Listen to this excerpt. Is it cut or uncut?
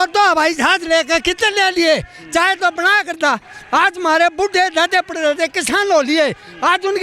uncut